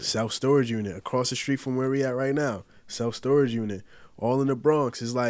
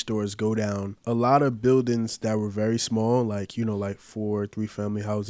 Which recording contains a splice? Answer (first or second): second